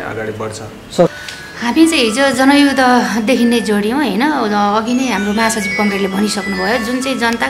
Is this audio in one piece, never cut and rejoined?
no; 1 cut; at 1.1 s

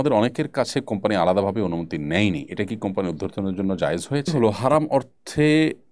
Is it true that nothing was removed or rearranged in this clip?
no; 1 cut; at 4.4 s

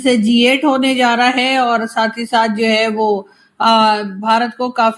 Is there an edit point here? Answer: no; 0 cuts

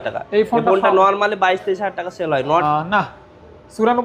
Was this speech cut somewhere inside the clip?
yes; 1 cut; at 2.6 s

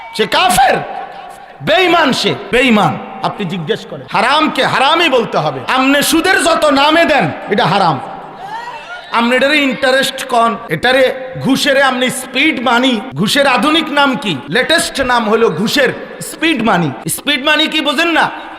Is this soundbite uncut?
no; 7 cuts; at 2.4 s, 3.9 s, 5.6 s, 10.7 s, 13.1 s, 14.4 s, 17.1 s

